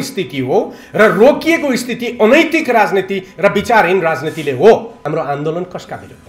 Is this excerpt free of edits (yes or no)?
no